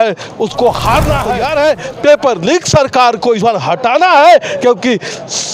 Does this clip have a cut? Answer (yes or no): yes